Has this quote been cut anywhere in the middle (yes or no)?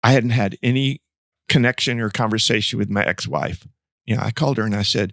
yes